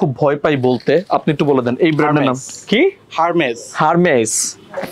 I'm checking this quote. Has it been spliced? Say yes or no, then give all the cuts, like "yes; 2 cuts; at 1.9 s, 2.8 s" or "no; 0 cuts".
no; 0 cuts